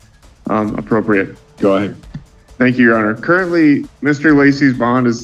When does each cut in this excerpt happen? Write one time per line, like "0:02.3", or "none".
none